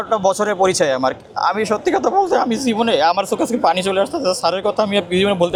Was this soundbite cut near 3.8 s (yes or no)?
no